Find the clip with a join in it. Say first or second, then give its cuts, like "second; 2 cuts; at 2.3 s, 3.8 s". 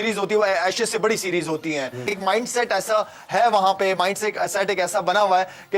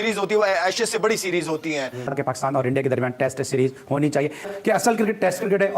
second; 1 cut; at 2.0 s